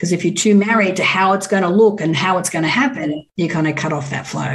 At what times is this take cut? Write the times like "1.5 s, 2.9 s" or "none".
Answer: 3.3 s